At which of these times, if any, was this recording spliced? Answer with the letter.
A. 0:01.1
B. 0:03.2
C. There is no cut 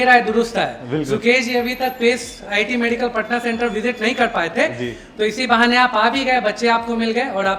C